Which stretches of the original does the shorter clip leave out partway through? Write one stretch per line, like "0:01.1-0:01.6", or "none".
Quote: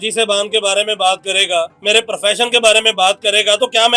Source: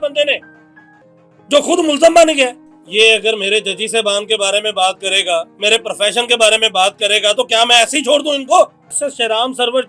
none